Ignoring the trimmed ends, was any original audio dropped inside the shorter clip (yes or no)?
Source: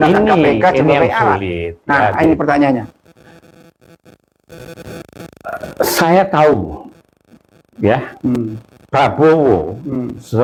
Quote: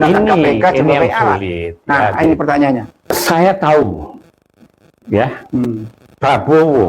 yes